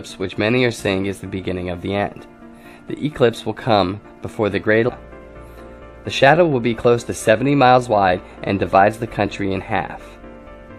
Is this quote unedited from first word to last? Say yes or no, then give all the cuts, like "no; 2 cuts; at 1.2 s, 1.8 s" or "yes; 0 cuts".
yes; 0 cuts